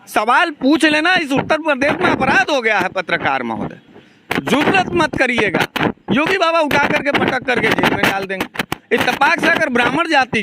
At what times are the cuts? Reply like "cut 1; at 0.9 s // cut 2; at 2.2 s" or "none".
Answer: none